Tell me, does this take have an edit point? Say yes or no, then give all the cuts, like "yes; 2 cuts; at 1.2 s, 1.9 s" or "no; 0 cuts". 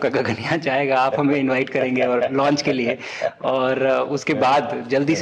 no; 0 cuts